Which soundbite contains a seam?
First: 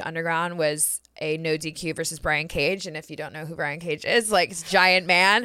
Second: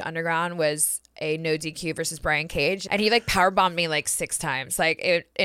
second; 1 cut; at 2.8 s

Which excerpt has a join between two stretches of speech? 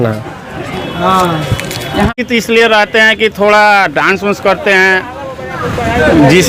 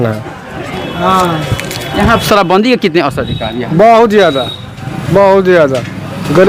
first; 1 cut; at 2.1 s

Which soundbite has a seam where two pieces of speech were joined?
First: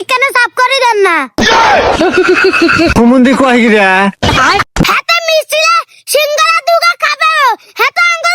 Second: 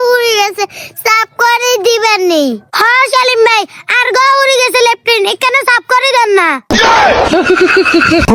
first; 1 cut; at 4.8 s

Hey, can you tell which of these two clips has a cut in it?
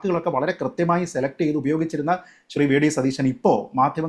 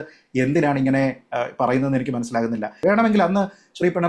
second; 1 cut; at 2.8 s

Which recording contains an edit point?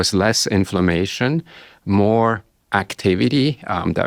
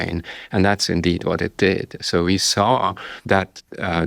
second; 1 cut; at 3.1 s

